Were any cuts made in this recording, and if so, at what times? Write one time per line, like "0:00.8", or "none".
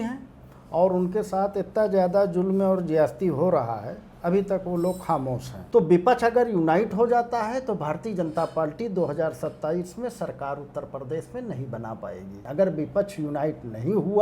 0:05.5
0:12.4